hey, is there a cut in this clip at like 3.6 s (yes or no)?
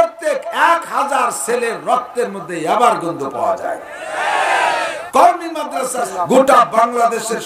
no